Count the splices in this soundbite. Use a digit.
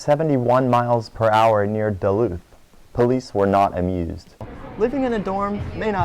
1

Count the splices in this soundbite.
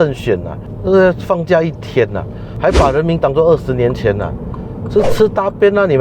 1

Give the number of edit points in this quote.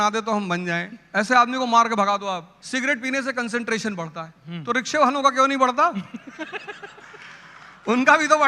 1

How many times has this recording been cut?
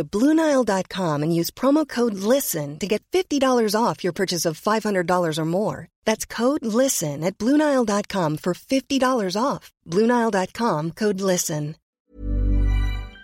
1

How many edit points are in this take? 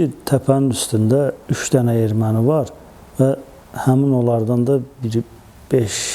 1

